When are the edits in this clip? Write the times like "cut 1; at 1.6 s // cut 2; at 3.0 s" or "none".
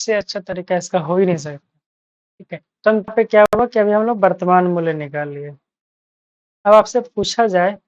cut 1; at 3.1 s

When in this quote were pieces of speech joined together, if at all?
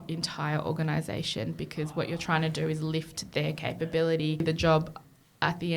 cut 1; at 4.4 s

